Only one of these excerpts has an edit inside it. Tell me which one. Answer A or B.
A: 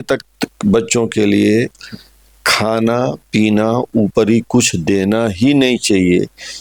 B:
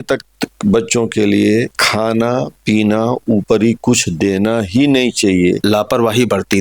B